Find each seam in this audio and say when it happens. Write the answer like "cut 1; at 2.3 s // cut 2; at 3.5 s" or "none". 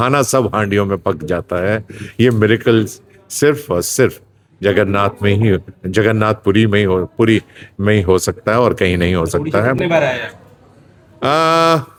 none